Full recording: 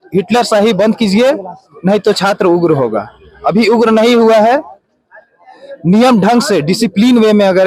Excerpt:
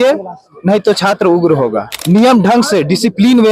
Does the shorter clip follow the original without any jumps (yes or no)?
no